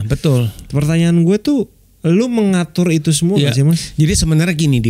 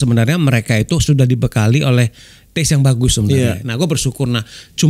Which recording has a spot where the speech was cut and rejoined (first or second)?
second